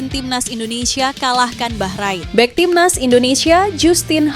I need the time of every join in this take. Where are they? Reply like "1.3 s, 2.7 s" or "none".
2.2 s